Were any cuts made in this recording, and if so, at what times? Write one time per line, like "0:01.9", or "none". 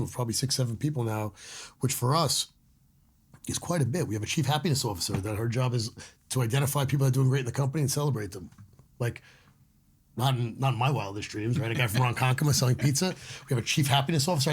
none